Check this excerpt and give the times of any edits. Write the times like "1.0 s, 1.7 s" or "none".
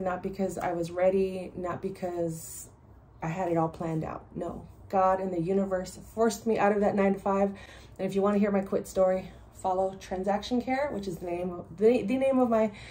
none